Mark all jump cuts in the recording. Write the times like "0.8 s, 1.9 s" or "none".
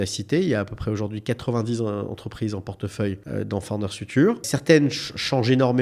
3.2 s, 4.5 s